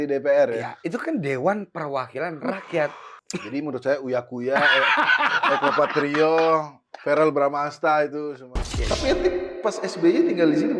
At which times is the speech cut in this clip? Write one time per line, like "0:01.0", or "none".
0:03.1
0:08.5

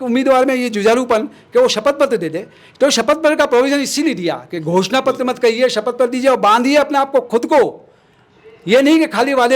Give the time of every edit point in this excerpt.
none

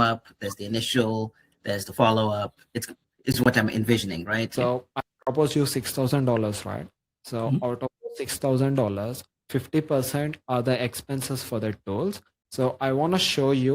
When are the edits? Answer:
0:04.5

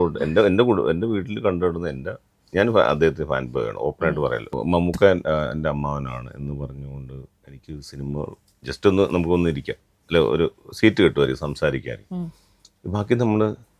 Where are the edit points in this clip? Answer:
0:04.5

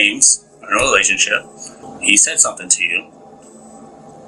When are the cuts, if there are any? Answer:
0:01.8

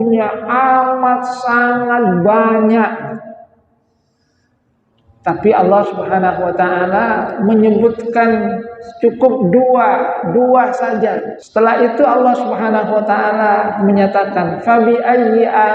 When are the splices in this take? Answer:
0:11.3

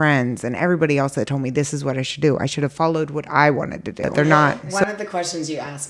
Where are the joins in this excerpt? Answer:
0:04.0

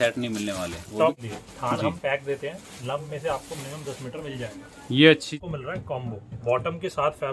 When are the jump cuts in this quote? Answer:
0:01.2
0:05.4

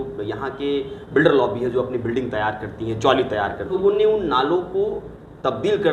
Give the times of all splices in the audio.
0:03.8

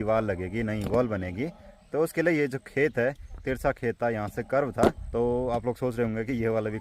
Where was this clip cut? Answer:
0:03.3
0:05.0

